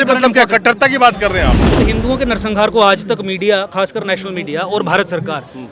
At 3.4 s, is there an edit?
no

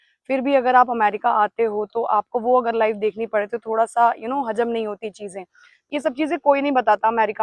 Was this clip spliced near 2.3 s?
no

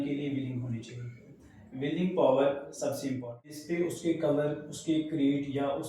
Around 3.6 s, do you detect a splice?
yes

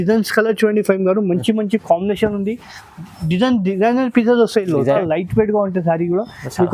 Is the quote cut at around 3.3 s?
no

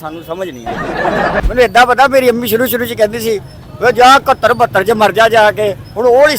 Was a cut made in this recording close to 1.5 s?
yes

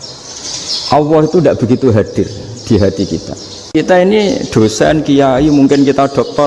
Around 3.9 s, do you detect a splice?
yes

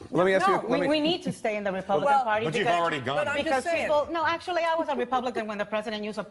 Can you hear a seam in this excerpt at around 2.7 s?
no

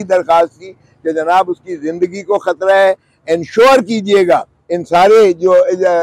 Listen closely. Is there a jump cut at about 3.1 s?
no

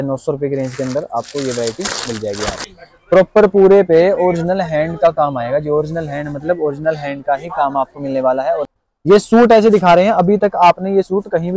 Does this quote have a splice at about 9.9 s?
no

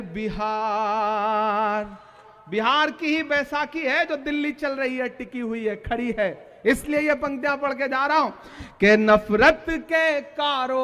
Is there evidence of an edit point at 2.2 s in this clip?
yes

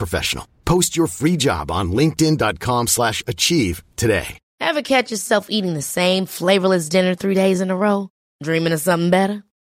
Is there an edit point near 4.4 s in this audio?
yes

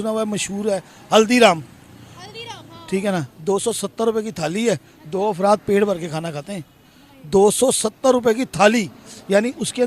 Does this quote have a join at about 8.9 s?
no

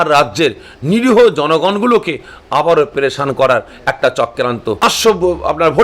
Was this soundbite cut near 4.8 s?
yes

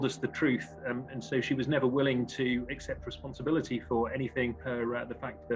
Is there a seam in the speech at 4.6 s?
yes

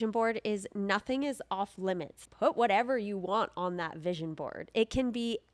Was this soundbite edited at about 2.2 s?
yes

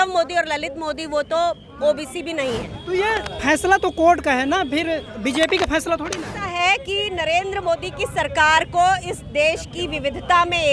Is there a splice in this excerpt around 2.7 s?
yes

